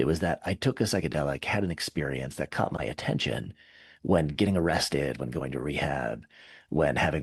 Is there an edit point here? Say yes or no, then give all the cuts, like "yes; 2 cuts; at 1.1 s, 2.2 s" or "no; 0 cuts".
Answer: no; 0 cuts